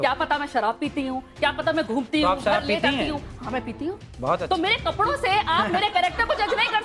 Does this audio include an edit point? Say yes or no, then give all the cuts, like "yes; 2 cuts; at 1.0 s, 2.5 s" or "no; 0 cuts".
no; 0 cuts